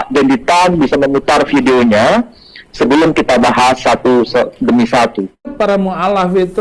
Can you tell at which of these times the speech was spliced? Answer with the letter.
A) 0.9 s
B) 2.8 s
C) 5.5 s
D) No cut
C